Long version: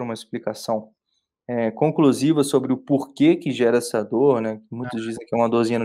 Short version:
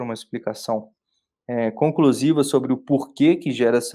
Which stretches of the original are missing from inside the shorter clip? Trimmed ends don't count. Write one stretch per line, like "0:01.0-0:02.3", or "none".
none